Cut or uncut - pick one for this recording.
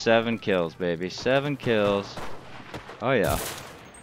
uncut